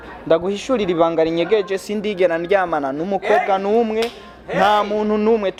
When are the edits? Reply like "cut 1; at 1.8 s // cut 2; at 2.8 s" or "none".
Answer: none